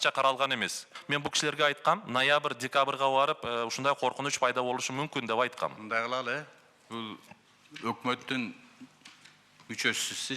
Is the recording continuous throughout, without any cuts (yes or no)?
no